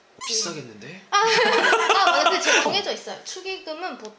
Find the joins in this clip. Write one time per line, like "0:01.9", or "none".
0:02.7